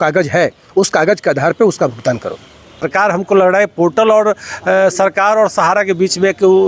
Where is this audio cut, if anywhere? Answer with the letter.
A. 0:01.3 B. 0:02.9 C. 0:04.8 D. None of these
B